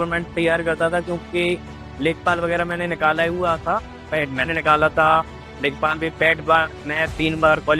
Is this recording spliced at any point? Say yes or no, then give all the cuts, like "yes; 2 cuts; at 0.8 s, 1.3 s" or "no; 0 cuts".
no; 0 cuts